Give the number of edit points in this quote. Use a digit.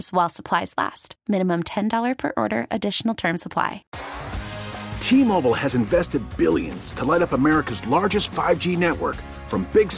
1